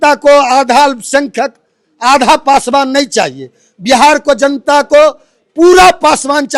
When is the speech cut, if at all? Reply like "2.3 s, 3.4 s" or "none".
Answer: none